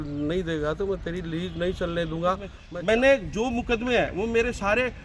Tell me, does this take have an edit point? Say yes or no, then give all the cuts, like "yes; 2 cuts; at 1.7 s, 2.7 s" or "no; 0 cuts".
yes; 1 cut; at 2.6 s